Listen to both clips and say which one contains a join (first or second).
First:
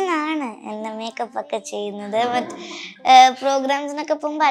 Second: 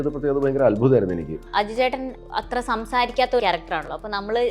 second